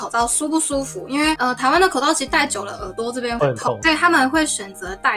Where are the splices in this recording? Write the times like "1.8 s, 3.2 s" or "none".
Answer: none